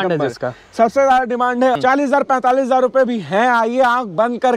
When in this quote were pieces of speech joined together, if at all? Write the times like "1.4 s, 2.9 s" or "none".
1.8 s